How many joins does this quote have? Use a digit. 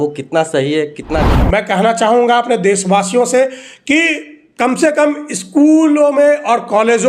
1